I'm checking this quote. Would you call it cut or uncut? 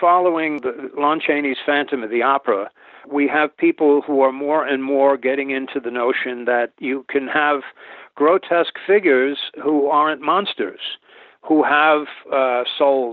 cut